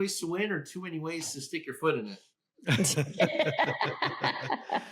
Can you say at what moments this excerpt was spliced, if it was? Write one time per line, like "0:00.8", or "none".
none